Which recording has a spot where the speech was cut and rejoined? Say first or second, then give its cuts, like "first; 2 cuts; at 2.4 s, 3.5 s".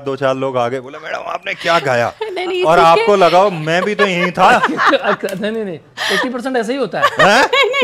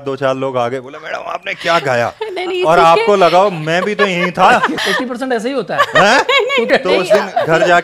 second; 2 cuts; at 4.8 s, 6.7 s